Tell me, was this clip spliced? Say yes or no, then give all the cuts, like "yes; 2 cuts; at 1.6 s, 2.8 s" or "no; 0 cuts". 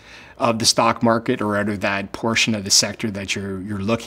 no; 0 cuts